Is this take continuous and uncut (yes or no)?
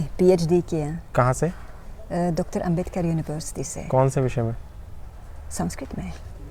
yes